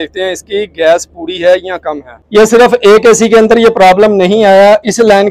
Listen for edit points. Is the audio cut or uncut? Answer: cut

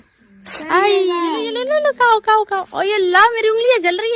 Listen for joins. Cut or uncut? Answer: cut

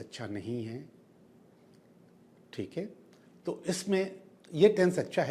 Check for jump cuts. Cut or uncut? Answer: uncut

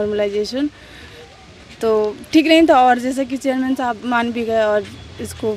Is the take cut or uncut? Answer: uncut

